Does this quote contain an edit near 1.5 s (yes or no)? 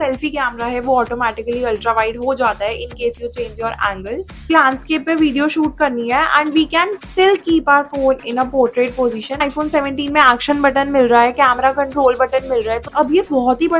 no